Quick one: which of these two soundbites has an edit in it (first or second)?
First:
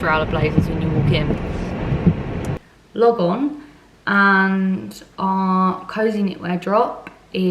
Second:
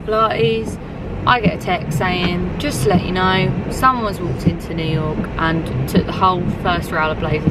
first